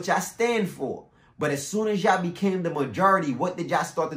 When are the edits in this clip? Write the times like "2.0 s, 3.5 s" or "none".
none